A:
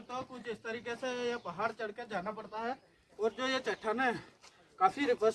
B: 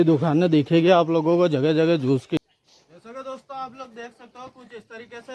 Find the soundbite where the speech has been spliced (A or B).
B